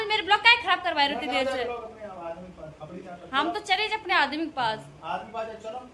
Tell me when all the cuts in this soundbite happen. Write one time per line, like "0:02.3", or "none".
none